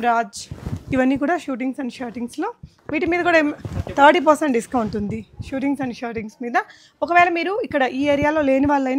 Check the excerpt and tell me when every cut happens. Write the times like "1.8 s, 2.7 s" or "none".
none